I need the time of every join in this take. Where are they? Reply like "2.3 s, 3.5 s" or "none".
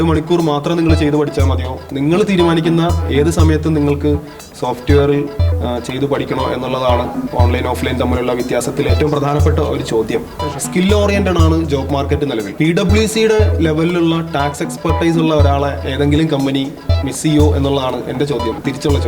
10.3 s, 12.5 s